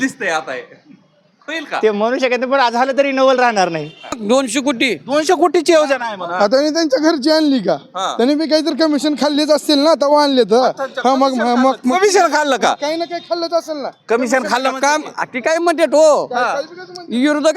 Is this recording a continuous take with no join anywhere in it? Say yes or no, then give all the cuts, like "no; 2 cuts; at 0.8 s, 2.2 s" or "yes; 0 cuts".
no; 1 cut; at 4.2 s